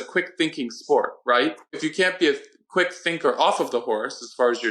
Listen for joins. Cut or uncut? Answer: cut